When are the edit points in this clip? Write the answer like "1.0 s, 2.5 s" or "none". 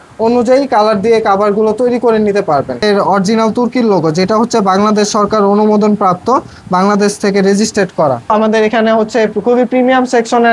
2.8 s, 8.3 s

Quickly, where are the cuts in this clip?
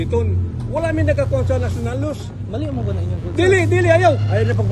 none

